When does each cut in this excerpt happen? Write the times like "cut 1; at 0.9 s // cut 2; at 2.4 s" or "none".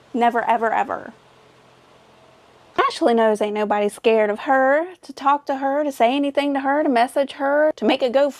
cut 1; at 2.8 s